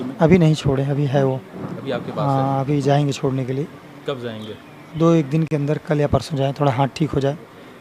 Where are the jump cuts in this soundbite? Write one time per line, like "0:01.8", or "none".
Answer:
none